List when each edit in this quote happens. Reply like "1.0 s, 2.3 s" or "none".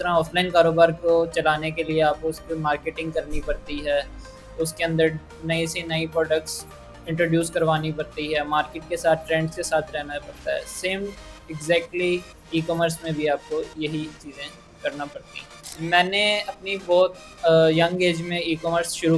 15.6 s